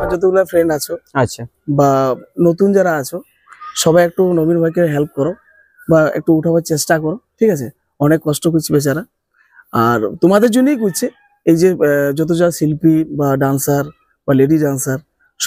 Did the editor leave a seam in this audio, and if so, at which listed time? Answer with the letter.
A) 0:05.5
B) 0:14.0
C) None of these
C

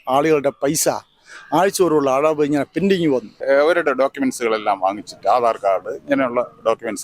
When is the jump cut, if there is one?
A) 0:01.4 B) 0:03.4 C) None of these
B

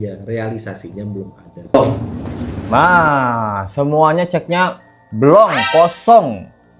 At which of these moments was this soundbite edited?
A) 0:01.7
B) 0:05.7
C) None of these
A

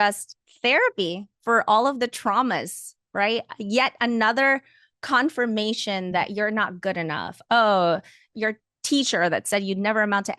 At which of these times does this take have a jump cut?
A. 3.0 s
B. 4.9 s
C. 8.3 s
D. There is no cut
C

